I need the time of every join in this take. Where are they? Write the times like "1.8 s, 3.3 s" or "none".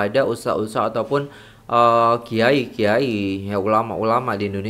none